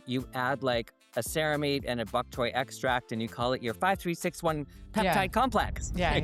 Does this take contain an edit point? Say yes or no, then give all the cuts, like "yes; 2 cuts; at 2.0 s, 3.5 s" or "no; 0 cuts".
no; 0 cuts